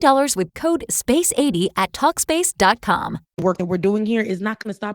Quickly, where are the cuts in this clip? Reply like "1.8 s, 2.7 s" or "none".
3.2 s